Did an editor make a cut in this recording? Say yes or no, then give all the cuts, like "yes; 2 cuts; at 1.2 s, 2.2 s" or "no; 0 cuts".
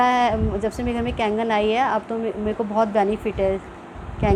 no; 0 cuts